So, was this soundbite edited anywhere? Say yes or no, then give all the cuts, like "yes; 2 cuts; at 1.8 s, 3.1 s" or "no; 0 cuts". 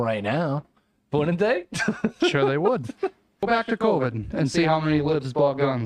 yes; 1 cut; at 3.4 s